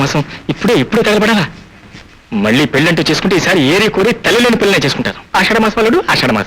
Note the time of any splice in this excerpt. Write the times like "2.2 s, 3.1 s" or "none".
5.2 s